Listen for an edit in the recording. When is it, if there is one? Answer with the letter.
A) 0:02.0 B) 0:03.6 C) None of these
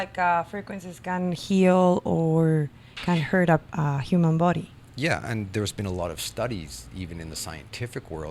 C